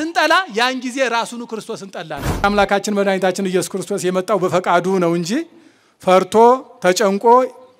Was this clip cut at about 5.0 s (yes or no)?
no